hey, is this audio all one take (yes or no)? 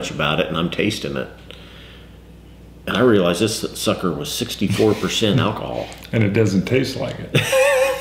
yes